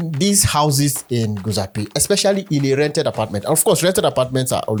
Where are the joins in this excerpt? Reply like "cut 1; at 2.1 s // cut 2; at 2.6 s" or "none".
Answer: none